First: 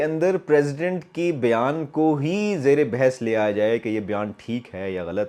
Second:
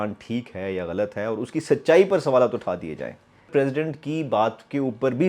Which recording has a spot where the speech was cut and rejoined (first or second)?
second